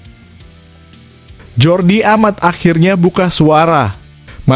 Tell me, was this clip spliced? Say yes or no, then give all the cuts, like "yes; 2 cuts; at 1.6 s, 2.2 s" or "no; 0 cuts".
yes; 1 cut; at 1.5 s